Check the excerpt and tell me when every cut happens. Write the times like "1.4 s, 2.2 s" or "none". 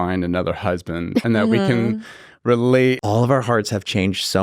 1.2 s, 3.0 s